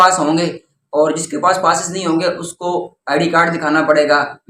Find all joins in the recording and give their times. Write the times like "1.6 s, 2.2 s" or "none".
none